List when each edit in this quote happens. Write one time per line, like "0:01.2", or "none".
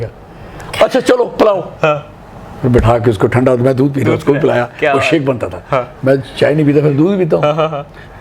none